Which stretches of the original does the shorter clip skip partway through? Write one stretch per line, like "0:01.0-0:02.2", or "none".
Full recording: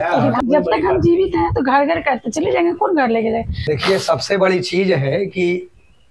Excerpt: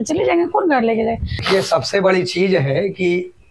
0:03.7-0:03.8